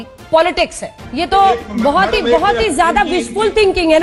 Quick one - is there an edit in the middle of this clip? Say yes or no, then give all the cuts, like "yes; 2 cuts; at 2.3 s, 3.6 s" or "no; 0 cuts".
no; 0 cuts